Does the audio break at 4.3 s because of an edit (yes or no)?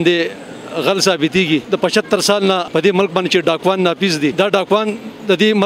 yes